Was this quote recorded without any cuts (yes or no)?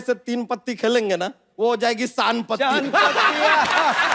no